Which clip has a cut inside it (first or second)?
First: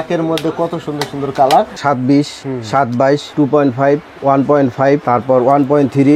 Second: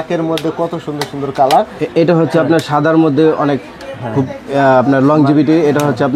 first